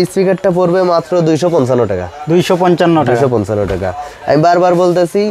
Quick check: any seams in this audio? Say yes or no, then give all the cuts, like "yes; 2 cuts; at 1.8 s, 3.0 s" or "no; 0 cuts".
no; 0 cuts